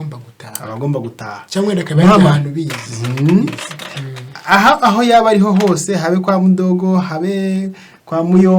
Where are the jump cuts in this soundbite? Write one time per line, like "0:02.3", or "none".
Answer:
none